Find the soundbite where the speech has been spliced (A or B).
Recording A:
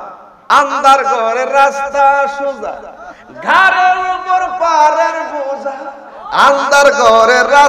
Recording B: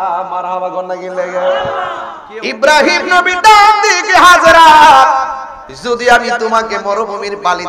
B